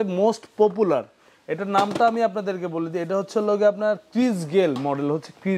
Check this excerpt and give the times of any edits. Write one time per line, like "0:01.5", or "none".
none

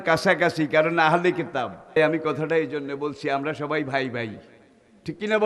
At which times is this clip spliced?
0:02.0

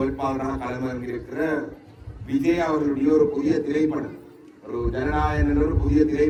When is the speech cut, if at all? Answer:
none

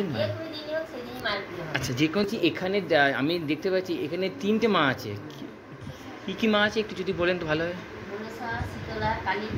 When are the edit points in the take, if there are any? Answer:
0:02.2

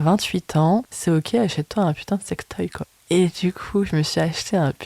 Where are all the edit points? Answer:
0:00.9
0:02.9

